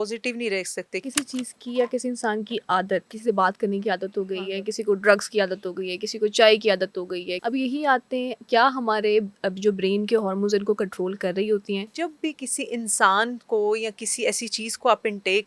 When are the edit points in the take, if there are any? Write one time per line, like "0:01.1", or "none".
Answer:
0:01.0
0:03.1
0:07.3
0:11.9